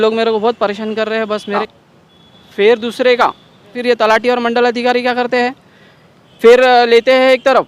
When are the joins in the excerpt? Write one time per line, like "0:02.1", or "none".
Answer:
0:01.8
0:03.8